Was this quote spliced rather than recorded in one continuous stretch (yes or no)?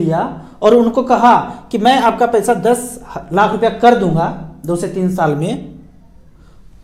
no